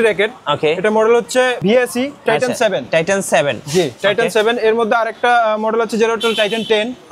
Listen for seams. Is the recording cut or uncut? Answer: cut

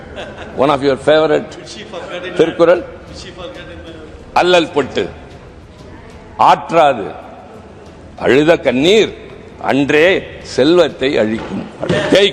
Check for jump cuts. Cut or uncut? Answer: uncut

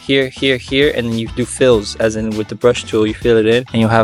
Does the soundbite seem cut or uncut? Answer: uncut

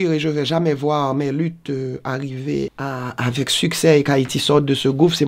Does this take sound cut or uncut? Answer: cut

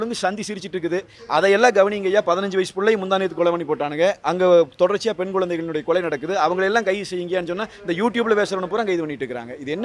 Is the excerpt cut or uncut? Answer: uncut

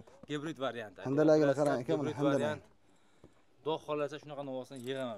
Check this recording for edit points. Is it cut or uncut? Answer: uncut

